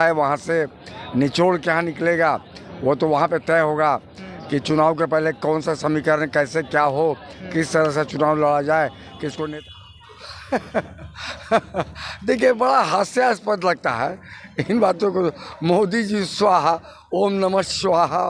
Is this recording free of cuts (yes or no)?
no